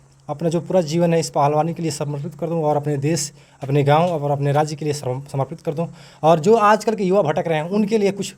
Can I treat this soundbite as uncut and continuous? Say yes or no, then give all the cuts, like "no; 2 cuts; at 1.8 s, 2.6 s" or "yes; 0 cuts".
yes; 0 cuts